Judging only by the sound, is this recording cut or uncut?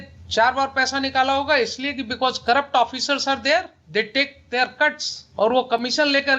uncut